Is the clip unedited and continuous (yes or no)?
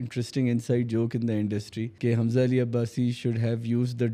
no